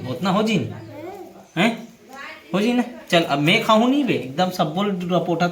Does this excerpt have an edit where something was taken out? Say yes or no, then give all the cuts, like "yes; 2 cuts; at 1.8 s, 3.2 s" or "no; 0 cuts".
no; 0 cuts